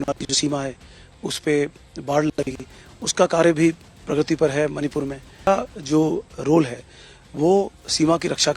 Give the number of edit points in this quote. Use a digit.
1